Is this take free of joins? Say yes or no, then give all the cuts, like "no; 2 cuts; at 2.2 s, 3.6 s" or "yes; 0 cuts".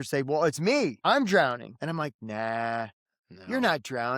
no; 2 cuts; at 1.0 s, 1.7 s